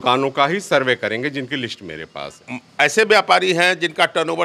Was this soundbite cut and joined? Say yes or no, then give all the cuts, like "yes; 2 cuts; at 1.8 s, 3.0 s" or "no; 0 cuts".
yes; 1 cut; at 2.4 s